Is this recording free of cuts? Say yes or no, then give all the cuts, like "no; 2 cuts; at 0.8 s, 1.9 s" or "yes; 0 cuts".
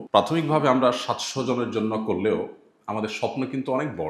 yes; 0 cuts